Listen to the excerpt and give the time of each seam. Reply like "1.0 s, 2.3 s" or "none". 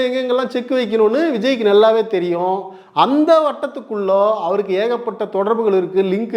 none